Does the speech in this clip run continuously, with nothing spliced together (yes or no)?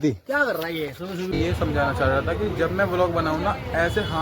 no